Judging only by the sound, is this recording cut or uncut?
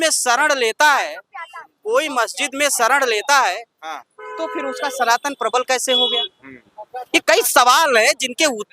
uncut